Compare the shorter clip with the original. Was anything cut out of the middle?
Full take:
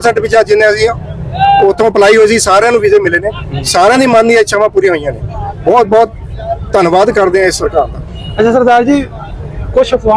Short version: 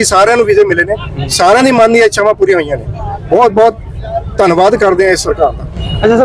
no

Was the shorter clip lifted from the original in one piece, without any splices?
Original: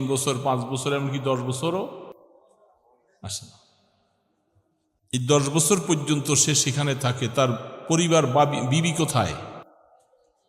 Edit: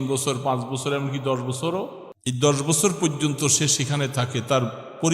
no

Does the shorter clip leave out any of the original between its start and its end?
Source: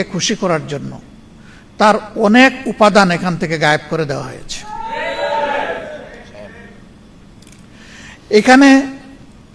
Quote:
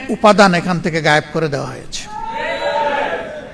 no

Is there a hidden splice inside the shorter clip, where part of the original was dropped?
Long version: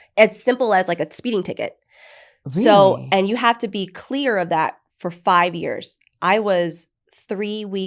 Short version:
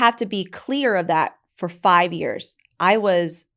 no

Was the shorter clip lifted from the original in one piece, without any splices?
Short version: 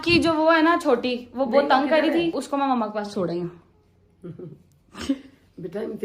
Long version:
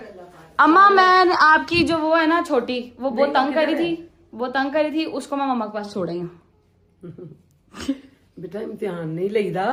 no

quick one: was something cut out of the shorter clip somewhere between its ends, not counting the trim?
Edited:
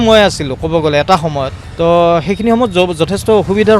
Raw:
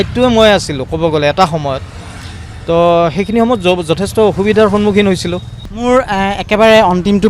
yes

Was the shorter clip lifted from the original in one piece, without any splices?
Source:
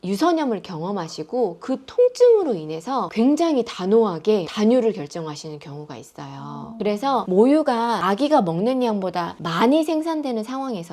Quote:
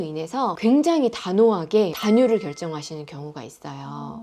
yes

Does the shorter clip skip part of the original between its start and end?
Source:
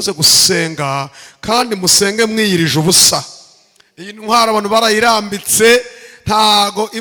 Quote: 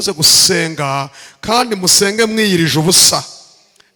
no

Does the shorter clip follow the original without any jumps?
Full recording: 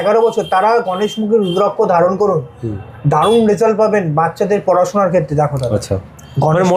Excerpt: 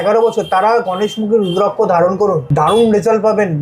no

